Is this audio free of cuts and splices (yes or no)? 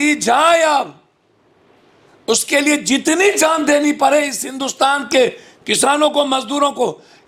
yes